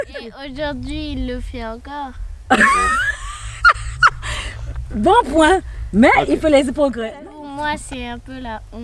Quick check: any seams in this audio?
no; 0 cuts

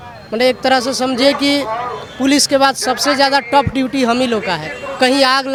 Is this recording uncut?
yes; 0 cuts

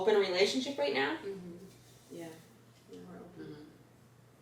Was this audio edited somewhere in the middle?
no; 0 cuts

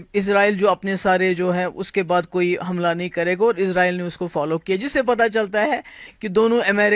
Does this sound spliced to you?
no; 0 cuts

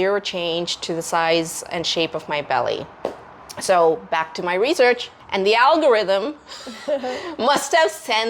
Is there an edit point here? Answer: no; 0 cuts

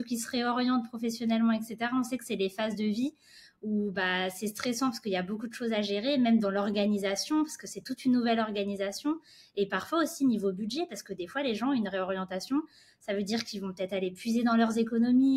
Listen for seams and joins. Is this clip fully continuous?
yes; 0 cuts

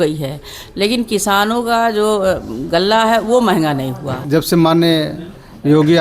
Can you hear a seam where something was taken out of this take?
yes; 1 cut; at 4.2 s

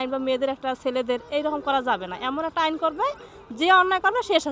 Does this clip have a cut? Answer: no; 0 cuts

